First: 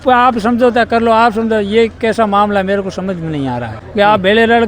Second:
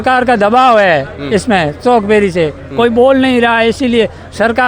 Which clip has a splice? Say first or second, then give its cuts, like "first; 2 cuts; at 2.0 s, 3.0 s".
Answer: first; 1 cut; at 3.8 s